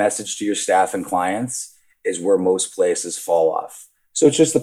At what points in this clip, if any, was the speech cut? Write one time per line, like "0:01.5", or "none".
0:03.7